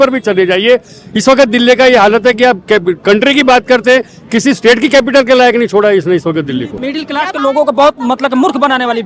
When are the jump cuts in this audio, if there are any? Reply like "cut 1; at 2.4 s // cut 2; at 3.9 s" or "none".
cut 1; at 6.8 s